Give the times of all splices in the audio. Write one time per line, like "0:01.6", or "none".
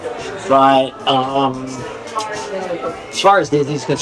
none